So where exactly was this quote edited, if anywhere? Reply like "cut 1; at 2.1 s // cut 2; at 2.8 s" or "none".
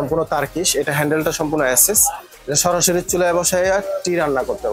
none